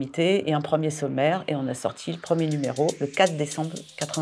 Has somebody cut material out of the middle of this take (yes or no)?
no